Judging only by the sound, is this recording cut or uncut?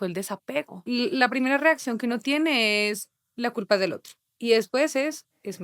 cut